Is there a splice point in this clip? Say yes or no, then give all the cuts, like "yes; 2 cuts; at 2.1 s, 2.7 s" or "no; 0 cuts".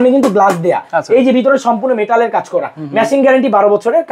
no; 0 cuts